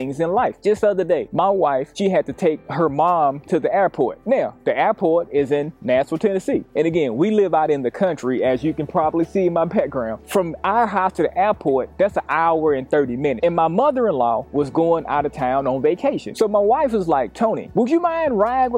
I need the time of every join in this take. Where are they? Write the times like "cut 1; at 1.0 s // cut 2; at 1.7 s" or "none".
none